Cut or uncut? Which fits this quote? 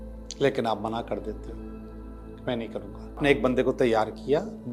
cut